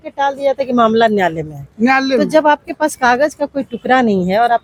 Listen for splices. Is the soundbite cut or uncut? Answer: uncut